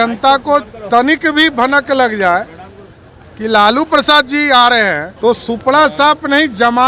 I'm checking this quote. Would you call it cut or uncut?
cut